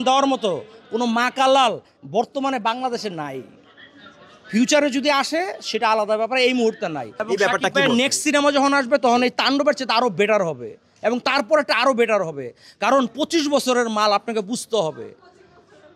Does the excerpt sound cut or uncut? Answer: uncut